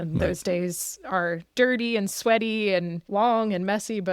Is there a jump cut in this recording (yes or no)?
yes